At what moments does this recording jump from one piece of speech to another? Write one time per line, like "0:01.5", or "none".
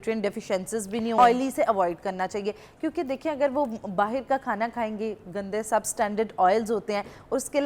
0:01.1